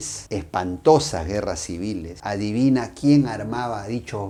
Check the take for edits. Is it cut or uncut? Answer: uncut